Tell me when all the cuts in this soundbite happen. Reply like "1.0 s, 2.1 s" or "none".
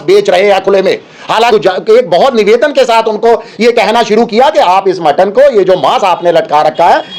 1.5 s